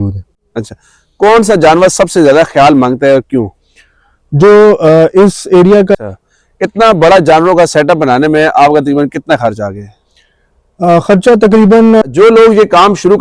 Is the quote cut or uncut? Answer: cut